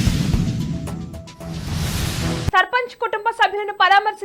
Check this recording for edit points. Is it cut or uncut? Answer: cut